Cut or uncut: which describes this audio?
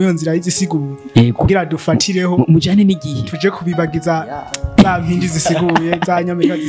uncut